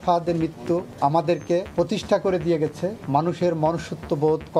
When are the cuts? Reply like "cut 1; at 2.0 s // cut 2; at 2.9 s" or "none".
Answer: cut 1; at 0.9 s // cut 2; at 1.7 s // cut 3; at 3.0 s